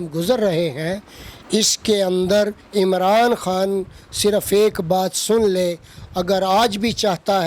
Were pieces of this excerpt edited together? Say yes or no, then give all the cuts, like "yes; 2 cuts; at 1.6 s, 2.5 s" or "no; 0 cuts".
no; 0 cuts